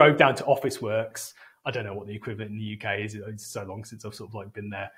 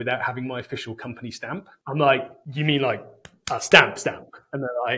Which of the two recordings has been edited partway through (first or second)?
second